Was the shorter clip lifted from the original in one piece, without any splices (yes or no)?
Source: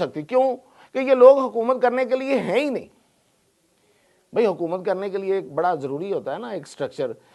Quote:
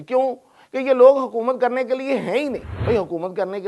no